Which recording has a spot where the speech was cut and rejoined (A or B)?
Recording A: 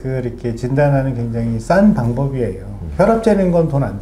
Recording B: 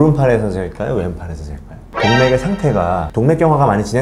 B